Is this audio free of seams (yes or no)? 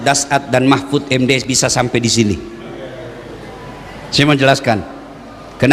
yes